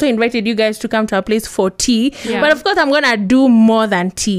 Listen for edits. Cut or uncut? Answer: uncut